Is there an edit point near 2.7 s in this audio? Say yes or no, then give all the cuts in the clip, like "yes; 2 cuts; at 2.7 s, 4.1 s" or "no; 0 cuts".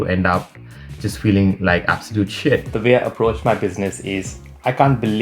yes; 1 cut; at 2.7 s